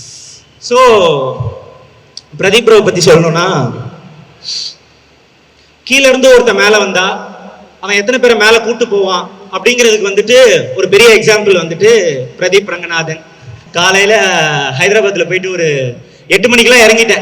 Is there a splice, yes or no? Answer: yes